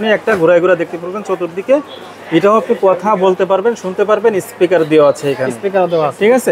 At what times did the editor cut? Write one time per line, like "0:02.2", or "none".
none